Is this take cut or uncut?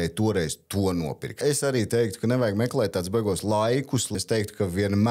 cut